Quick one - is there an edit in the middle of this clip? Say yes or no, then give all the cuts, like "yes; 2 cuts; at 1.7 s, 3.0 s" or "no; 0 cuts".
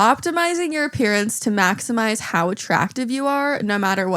no; 0 cuts